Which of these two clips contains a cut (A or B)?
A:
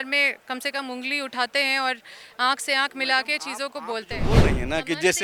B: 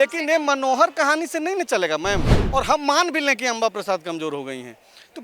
B